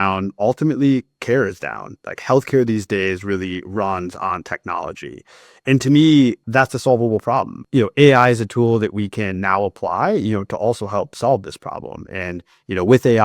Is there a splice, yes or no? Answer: yes